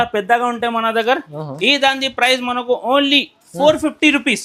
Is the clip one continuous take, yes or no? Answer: yes